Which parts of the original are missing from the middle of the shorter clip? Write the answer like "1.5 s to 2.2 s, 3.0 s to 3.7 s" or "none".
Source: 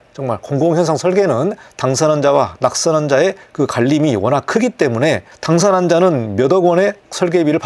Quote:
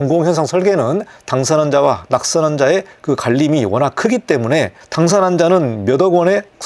none